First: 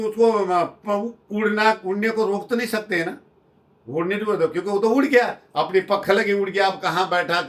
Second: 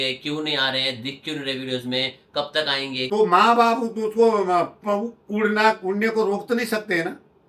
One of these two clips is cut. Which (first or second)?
second